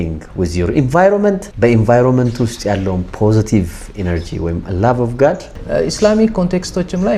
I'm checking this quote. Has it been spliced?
yes; 2 cuts; at 1.5 s, 5.5 s

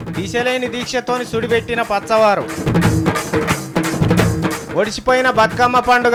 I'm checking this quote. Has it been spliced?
no; 0 cuts

